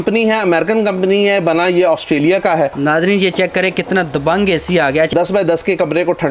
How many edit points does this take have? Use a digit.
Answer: 2